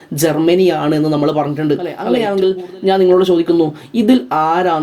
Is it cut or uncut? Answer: cut